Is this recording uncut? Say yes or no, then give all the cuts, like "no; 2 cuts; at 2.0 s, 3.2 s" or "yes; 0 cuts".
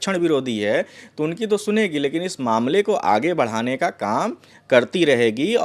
yes; 0 cuts